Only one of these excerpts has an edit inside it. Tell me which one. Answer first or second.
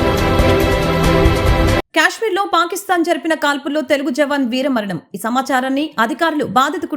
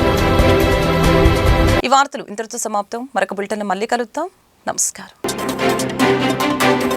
first